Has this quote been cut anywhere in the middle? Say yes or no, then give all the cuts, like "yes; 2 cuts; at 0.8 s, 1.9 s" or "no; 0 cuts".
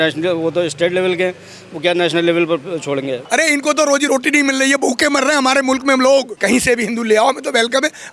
yes; 2 cuts; at 3.2 s, 6.3 s